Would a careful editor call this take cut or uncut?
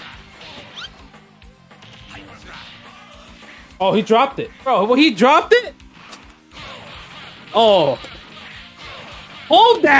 cut